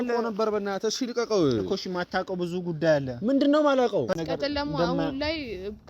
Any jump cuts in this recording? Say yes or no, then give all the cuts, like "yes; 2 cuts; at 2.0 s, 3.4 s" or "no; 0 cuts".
yes; 1 cut; at 4.2 s